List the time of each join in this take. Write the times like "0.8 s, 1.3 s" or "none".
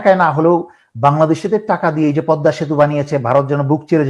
none